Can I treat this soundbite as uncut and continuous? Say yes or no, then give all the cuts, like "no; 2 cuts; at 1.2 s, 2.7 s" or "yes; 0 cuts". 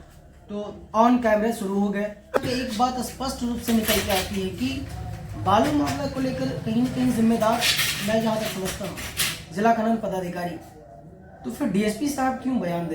no; 1 cut; at 2.4 s